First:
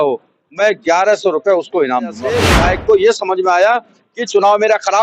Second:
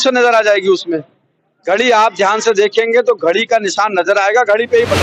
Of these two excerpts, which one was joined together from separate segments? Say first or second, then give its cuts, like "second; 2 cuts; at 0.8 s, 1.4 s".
first; 1 cut; at 2.5 s